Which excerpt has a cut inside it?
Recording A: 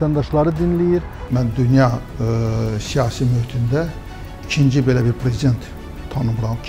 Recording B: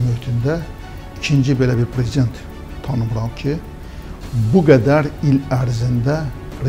A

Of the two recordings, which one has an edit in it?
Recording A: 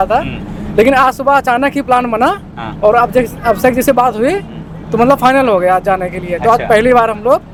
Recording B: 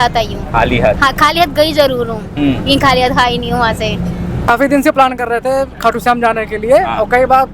B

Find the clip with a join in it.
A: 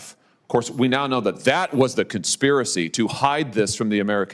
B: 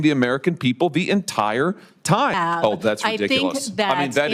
B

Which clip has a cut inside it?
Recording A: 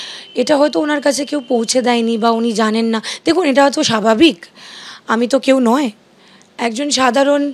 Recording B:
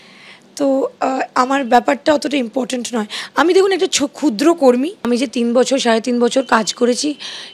B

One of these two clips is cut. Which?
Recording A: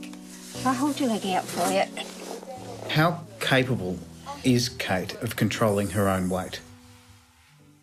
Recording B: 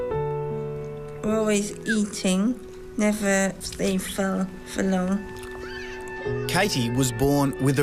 B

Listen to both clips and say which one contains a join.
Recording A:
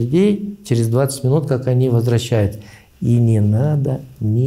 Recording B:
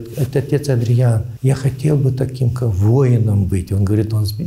B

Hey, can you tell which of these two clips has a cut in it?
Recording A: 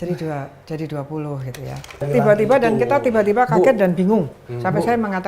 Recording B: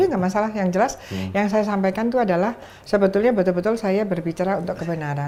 A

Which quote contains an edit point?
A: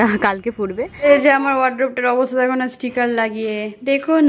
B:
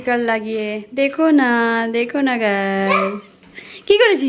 A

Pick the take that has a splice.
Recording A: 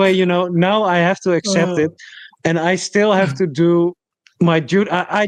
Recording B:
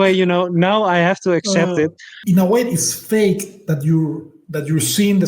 B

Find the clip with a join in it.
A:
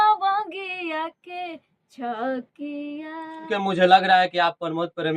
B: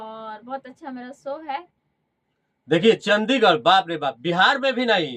A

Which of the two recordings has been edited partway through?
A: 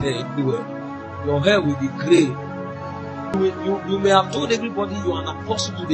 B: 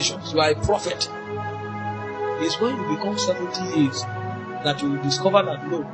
A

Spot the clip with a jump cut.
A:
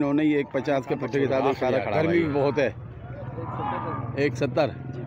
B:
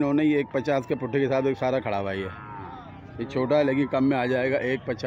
A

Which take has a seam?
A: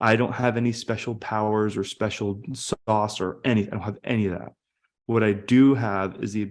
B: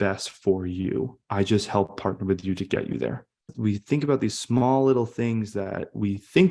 B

